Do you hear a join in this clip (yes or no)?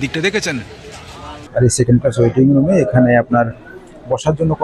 yes